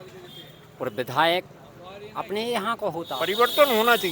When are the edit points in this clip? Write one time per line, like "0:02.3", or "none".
0:03.2